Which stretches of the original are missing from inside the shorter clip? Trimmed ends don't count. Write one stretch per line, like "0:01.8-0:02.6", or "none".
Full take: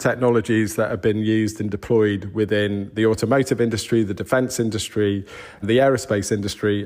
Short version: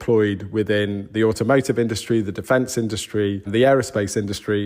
0:05.2-0:05.6